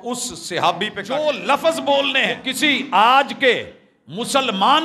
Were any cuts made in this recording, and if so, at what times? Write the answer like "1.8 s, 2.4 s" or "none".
1.2 s, 2.5 s